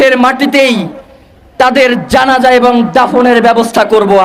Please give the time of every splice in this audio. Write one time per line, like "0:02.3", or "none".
none